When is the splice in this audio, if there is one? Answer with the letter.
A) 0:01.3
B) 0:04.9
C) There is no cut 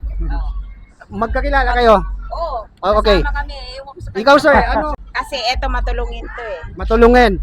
B